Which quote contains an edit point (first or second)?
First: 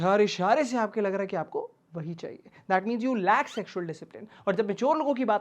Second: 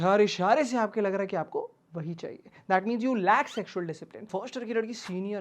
second